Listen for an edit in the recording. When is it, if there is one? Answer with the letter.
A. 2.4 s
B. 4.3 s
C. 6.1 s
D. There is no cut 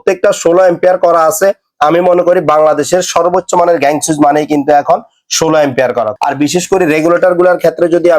C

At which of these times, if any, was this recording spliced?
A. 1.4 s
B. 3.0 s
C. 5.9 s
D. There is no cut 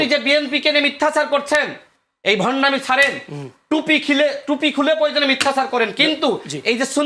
D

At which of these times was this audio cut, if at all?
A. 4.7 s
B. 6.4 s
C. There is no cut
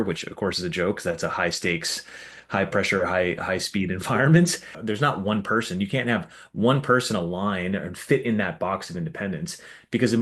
A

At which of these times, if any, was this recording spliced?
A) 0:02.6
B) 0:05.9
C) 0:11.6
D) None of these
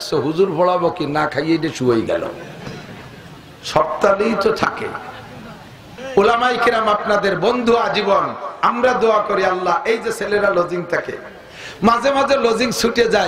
B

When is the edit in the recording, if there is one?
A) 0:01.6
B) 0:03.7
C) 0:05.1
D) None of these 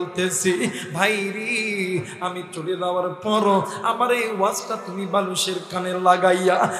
D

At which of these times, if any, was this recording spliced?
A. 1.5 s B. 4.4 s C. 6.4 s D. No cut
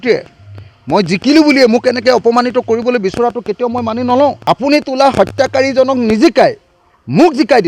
B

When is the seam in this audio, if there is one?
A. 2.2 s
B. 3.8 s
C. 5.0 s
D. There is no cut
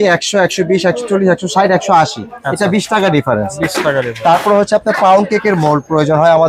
D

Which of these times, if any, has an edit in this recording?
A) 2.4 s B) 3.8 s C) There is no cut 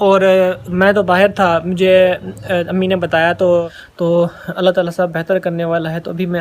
B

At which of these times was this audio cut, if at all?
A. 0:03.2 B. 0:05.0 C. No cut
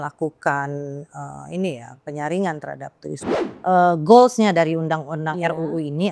A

